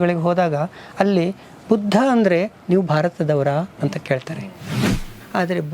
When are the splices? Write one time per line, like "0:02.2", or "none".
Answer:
0:04.8